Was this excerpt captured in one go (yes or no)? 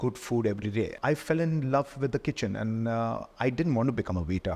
no